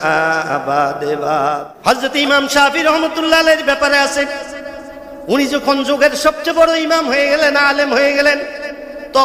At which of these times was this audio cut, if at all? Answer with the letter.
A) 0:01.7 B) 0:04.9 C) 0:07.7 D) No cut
A